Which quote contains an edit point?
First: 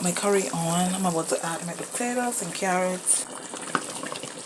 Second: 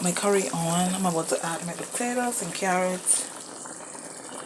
first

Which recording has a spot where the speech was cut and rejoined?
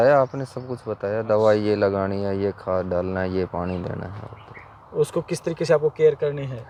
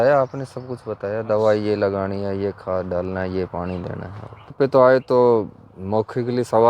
second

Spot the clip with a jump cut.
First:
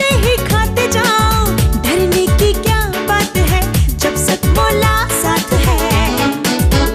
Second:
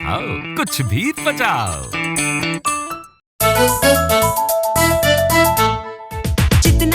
second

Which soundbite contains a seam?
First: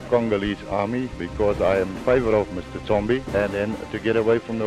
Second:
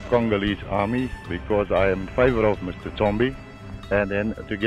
first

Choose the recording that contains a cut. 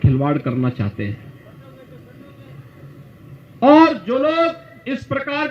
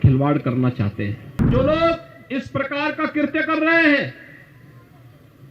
second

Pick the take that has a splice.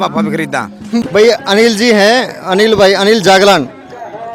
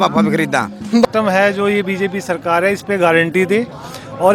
second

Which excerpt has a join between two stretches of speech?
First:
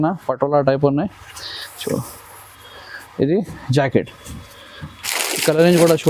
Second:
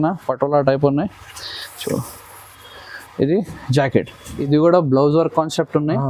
second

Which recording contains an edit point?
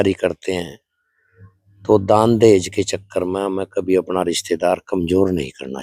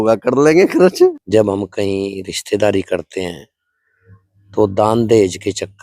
second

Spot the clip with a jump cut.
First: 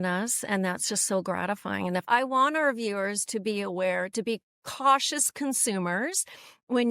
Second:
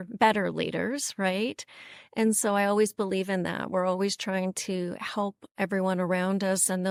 first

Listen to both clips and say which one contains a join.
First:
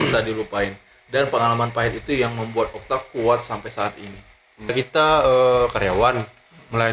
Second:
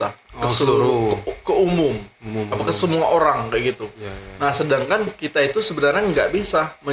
first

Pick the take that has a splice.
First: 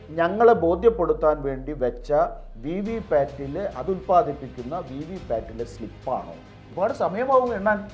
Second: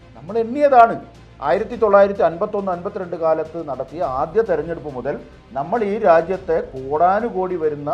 first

